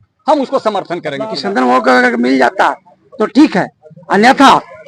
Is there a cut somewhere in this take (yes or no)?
yes